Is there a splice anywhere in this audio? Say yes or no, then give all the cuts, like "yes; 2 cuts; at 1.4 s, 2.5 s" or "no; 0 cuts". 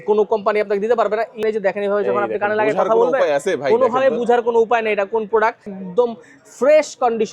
yes; 2 cuts; at 1.4 s, 5.7 s